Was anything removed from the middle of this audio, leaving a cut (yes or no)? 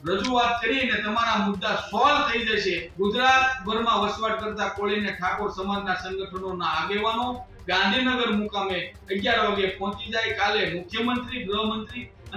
yes